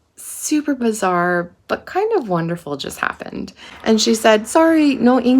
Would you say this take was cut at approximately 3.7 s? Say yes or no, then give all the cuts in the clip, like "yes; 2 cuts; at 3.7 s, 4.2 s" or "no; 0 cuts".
yes; 1 cut; at 3.7 s